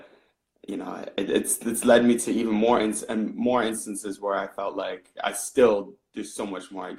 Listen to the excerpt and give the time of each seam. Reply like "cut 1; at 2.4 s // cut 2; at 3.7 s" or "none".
none